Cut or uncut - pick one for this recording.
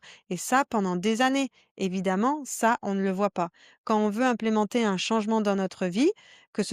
uncut